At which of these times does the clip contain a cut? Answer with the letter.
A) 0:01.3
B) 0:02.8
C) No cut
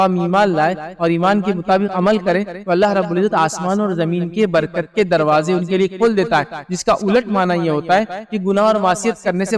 C